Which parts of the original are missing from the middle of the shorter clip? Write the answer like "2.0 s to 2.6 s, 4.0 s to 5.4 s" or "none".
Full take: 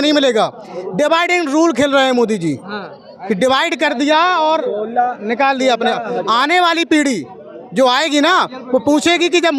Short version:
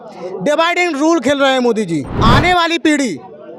2.7 s to 6.2 s